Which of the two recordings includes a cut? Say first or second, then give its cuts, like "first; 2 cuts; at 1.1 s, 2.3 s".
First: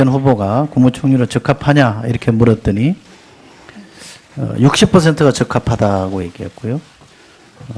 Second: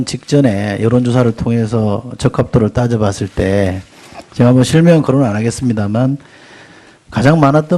first; 1 cut; at 4.9 s